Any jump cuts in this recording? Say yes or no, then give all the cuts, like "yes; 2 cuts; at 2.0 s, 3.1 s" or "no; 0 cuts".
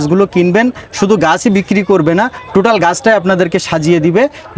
no; 0 cuts